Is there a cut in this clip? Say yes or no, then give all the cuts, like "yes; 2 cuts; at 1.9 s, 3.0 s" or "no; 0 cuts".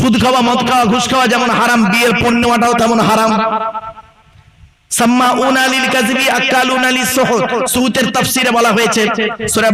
no; 0 cuts